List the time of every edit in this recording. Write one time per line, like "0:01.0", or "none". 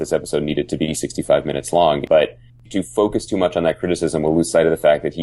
0:02.4